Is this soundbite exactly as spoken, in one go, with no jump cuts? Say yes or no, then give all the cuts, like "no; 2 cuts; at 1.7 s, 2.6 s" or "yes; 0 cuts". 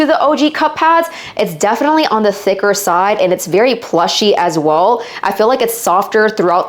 yes; 0 cuts